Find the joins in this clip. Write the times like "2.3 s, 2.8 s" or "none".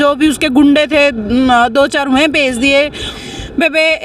3.1 s